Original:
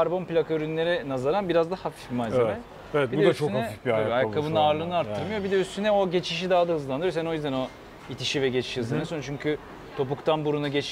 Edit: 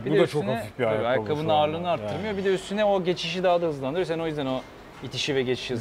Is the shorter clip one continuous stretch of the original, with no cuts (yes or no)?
yes